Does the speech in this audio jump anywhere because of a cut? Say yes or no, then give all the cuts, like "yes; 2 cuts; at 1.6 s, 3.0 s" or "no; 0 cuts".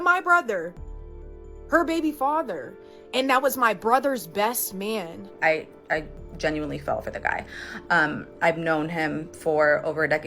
yes; 2 cuts; at 2.9 s, 5.3 s